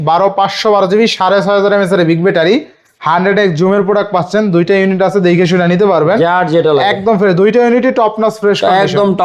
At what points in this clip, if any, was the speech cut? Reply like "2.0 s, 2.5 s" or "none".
none